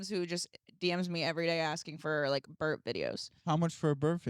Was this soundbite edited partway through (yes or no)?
yes